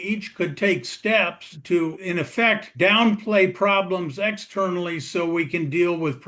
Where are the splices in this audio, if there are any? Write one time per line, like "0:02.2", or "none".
0:02.7

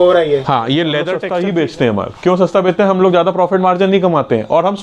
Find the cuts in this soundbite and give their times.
0:01.2

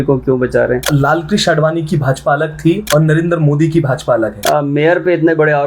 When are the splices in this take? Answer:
0:00.9
0:02.8
0:04.4

